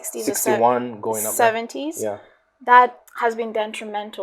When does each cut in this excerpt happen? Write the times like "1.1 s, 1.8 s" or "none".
3.0 s